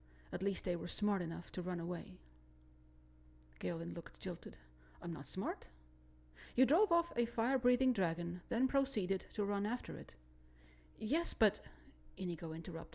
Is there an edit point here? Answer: yes; 1 cut; at 3.7 s

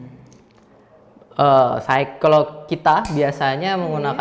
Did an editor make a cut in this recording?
no; 0 cuts

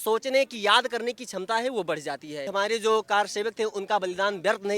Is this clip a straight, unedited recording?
no; 1 cut; at 2.5 s

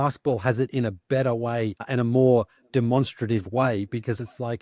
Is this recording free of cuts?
no; 1 cut; at 1.8 s

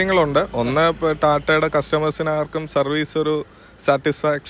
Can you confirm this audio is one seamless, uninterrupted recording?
yes; 0 cuts

